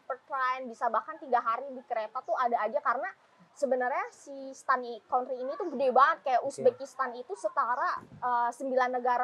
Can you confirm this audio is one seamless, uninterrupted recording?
yes; 0 cuts

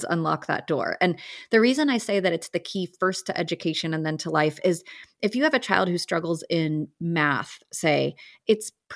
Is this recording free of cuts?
yes; 0 cuts

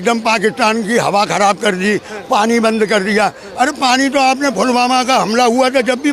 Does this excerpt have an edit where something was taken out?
no; 0 cuts

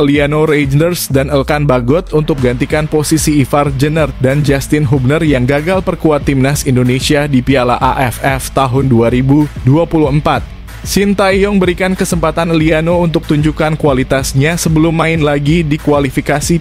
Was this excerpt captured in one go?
yes; 0 cuts

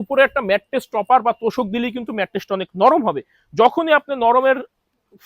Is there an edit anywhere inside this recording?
no; 0 cuts

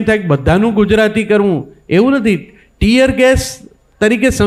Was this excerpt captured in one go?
yes; 0 cuts

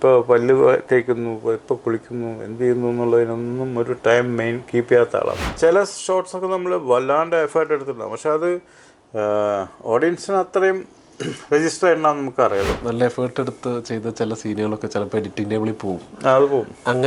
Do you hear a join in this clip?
yes; 2 cuts; at 5.5 s, 12.7 s

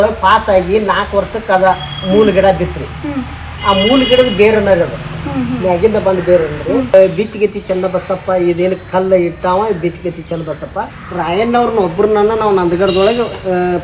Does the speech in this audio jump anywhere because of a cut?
yes; 2 cuts; at 6.9 s, 10.9 s

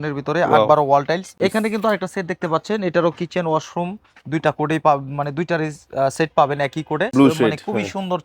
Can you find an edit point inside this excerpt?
yes; 2 cuts; at 1.4 s, 7.1 s

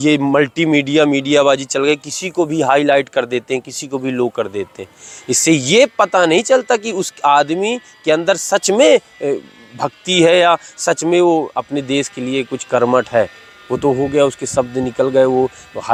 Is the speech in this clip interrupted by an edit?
no; 0 cuts

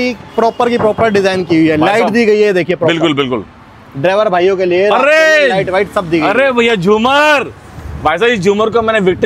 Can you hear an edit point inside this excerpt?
no; 0 cuts

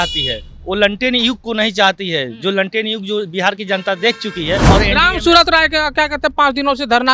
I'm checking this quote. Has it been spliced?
yes; 1 cut; at 4.7 s

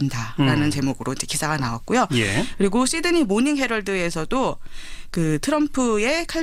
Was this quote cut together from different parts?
no; 0 cuts

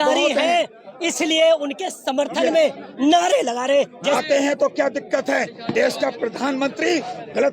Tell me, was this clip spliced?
yes; 1 cut; at 4.2 s

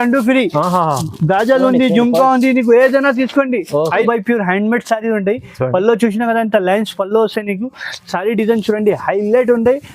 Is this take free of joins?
no; 1 cut; at 4.0 s

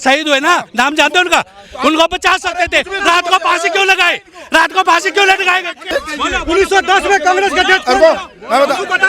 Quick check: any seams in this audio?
yes; 1 cut; at 5.9 s

